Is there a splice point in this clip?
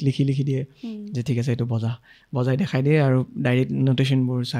no; 0 cuts

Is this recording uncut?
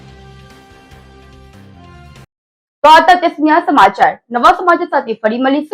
yes; 0 cuts

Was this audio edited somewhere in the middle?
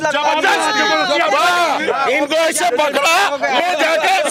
no; 0 cuts

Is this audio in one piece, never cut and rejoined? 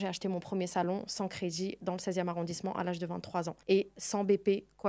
no; 1 cut; at 3.6 s

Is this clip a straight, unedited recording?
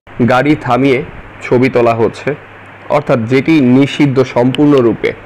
yes; 0 cuts

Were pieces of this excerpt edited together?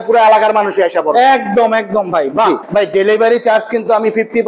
yes; 1 cut; at 2.6 s

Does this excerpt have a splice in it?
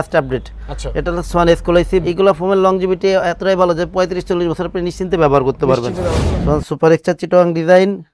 yes; 2 cuts; at 2.0 s, 6.1 s

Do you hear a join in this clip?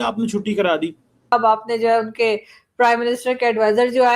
yes; 1 cut; at 1.2 s

